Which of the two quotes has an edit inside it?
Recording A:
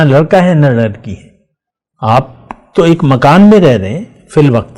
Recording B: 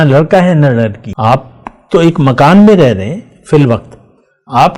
B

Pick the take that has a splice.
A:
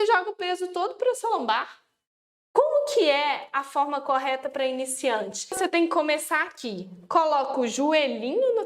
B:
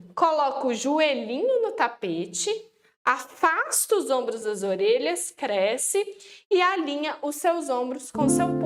A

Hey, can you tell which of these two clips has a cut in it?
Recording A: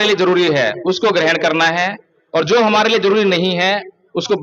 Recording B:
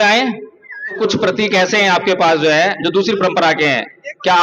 B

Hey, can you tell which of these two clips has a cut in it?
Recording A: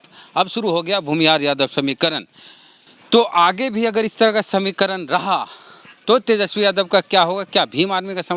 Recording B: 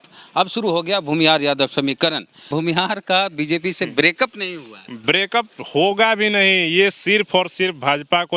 B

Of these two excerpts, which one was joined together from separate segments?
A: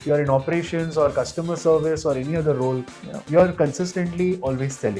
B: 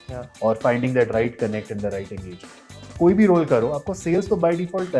B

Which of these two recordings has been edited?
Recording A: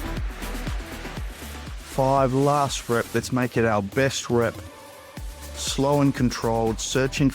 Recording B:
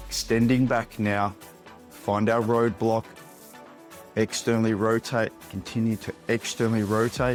A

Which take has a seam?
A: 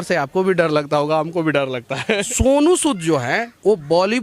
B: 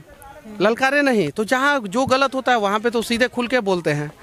A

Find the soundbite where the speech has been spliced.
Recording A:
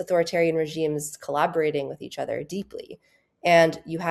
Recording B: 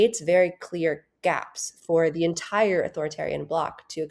A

